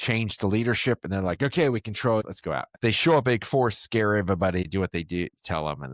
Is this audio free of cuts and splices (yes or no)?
no